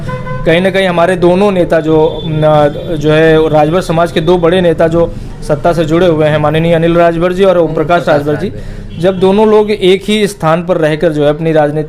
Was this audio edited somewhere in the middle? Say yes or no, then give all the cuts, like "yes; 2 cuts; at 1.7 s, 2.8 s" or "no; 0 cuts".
no; 0 cuts